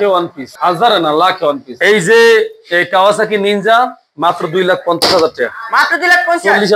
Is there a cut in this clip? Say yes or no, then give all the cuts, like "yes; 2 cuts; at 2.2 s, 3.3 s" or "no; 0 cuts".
yes; 1 cut; at 1.7 s